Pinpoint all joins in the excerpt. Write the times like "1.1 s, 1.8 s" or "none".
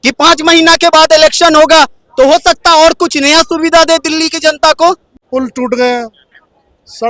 5.1 s